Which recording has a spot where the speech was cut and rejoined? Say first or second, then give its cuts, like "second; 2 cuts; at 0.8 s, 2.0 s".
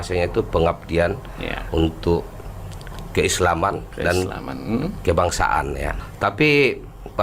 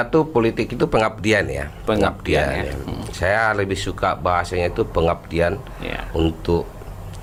first; 1 cut; at 6.0 s